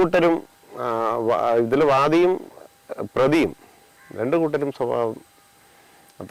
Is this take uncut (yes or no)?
yes